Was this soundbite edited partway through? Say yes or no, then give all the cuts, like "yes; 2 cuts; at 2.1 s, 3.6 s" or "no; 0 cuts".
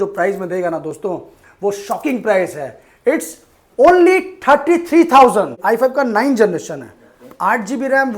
yes; 1 cut; at 5.6 s